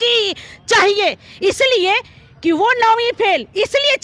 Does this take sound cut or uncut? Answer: uncut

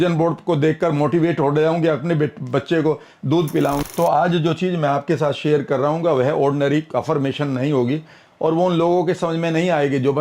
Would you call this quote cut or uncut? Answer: cut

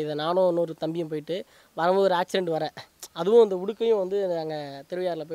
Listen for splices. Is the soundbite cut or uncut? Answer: uncut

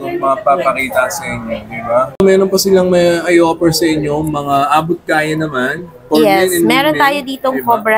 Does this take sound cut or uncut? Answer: cut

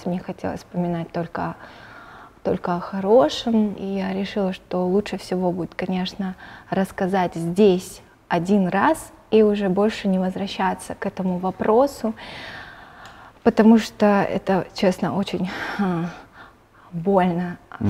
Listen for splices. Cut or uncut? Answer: cut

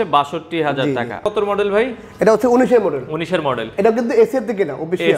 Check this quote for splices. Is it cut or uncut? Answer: cut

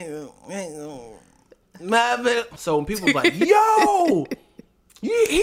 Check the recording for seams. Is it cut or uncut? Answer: cut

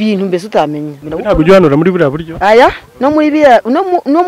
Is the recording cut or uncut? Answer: cut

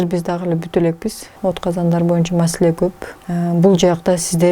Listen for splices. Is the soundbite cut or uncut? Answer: cut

